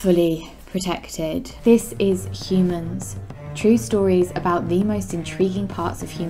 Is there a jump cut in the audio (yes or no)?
yes